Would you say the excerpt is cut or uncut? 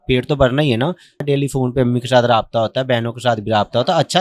cut